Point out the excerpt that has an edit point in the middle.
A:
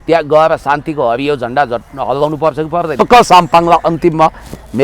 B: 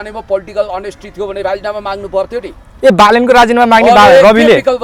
A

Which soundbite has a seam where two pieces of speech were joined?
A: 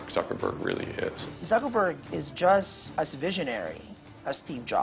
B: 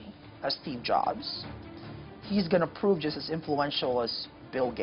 A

